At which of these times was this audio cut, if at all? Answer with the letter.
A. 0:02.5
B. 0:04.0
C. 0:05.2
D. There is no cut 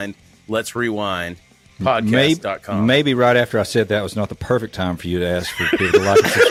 D